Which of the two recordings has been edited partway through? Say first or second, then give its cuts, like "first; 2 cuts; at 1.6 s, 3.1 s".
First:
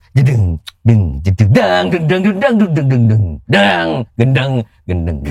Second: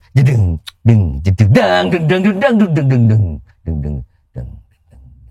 first; 1 cut; at 3.3 s